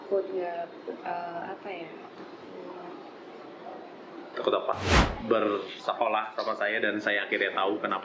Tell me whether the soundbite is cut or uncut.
cut